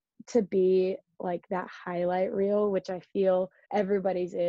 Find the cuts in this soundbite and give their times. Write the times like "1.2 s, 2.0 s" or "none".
3.6 s